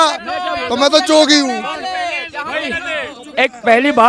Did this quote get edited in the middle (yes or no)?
no